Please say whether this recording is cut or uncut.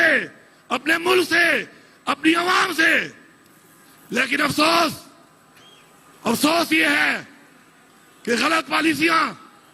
uncut